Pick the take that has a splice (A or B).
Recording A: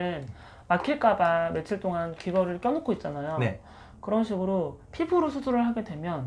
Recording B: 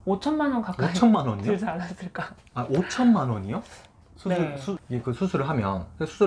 B